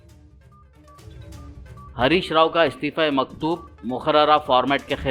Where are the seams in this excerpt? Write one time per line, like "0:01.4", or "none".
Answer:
0:01.3